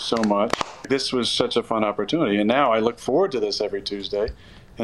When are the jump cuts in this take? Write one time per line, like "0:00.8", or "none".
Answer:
0:01.3